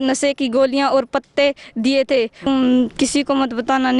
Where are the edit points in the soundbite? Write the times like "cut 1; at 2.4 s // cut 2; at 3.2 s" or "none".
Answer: cut 1; at 2.4 s